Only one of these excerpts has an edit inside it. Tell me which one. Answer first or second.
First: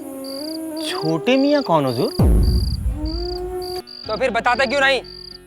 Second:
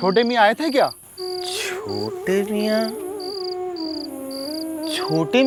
first